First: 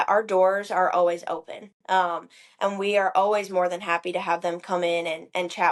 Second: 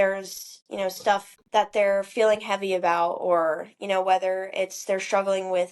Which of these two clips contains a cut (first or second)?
second